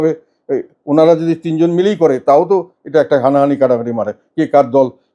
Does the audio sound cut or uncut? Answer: uncut